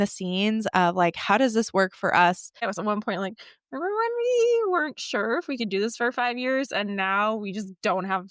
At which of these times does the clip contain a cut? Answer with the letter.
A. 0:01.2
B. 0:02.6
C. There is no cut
B